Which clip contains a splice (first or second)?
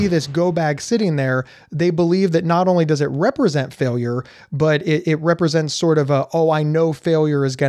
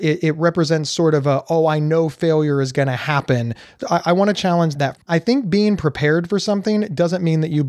second